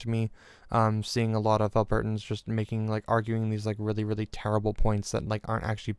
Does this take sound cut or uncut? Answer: uncut